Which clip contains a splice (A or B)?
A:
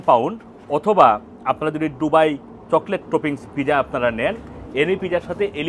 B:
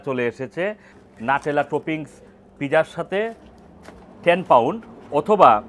B